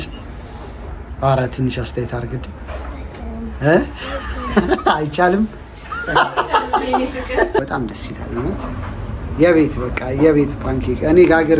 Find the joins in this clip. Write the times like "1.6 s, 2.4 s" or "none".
7.6 s